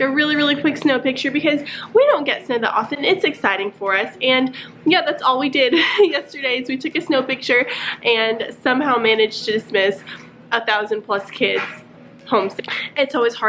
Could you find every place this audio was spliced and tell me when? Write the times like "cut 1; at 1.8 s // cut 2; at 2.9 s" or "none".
none